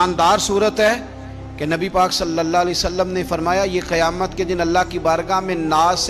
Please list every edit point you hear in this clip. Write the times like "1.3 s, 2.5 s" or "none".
none

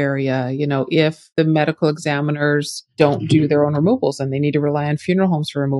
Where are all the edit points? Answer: 1.2 s

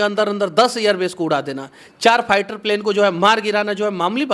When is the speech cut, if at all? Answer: none

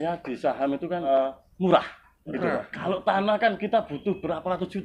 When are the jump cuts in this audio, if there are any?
1.1 s

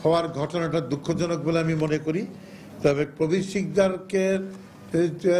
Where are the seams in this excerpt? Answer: none

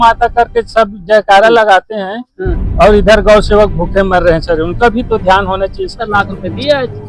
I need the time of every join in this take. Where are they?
6.0 s

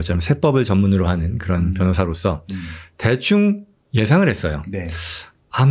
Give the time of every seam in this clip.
none

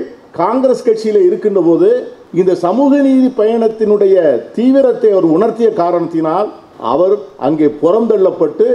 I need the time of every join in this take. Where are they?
2.2 s, 6.7 s

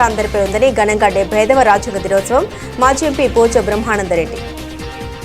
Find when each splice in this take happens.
4.3 s

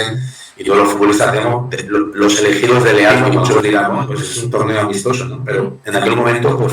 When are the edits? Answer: 3.6 s

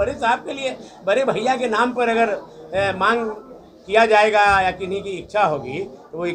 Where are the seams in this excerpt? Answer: none

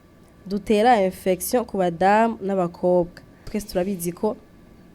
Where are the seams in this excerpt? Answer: 3.6 s

